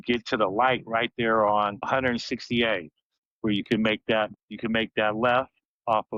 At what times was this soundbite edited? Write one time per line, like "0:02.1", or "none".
none